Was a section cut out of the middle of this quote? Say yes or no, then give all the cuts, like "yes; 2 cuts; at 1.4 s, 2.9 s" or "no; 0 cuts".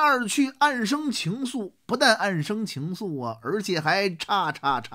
no; 0 cuts